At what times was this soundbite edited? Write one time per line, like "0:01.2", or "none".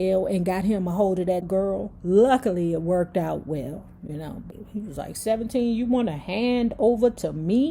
0:01.5
0:04.5